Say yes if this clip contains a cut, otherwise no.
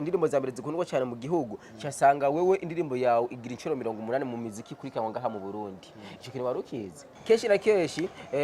yes